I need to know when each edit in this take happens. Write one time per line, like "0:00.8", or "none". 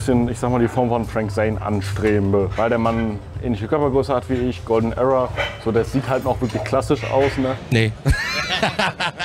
none